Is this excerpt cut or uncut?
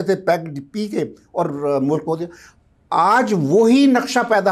uncut